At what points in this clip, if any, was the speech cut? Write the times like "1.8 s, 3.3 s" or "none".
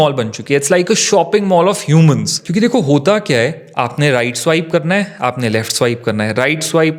none